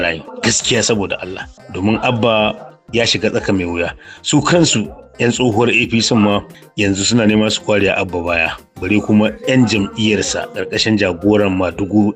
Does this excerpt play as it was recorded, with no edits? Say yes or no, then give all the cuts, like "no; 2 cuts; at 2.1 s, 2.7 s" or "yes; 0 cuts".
yes; 0 cuts